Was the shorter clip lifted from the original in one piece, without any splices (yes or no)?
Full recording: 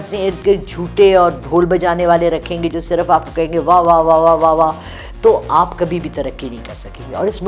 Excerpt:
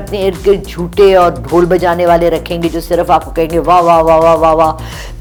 yes